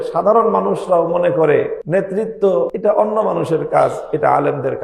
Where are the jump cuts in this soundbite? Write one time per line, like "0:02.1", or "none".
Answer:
0:01.8
0:02.7